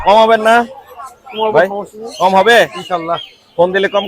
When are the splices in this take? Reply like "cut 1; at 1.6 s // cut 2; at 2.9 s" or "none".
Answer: none